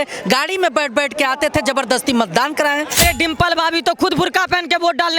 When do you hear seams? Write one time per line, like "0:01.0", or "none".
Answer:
0:03.0